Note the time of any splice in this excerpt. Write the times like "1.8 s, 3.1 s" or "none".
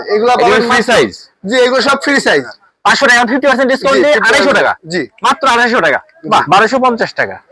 2.3 s, 6.1 s